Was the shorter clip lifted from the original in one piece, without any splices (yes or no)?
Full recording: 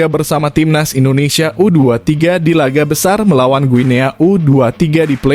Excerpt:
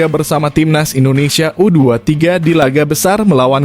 yes